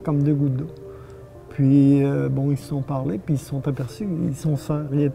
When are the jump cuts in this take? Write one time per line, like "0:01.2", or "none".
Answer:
none